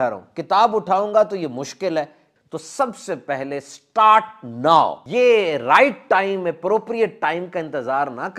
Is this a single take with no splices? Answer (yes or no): no